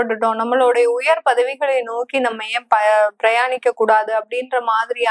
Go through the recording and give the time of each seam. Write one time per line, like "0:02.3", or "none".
none